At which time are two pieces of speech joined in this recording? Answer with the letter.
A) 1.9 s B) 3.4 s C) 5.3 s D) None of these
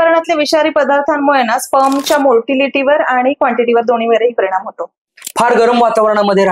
C